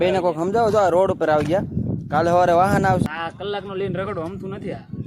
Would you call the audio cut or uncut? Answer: cut